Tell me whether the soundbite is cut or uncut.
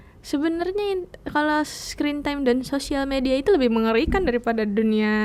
uncut